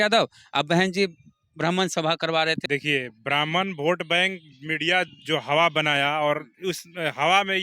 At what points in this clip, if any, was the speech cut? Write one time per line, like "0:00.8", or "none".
0:02.6